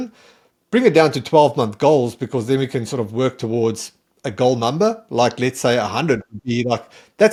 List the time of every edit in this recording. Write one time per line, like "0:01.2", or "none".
none